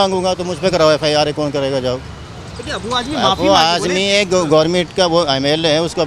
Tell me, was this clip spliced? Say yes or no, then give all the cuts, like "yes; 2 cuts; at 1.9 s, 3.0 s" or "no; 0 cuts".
no; 0 cuts